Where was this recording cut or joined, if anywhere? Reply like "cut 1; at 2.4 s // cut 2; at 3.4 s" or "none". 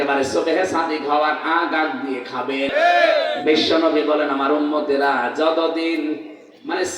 cut 1; at 2.7 s